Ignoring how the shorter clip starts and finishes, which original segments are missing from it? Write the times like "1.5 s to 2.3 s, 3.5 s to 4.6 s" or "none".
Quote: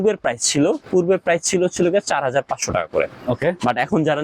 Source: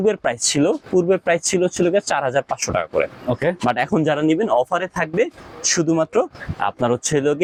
none